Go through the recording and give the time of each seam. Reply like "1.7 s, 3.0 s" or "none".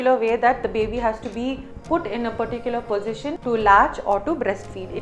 3.4 s